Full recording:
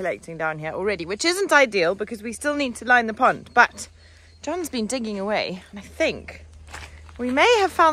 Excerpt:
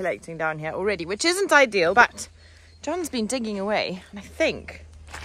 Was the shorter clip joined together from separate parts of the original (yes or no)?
yes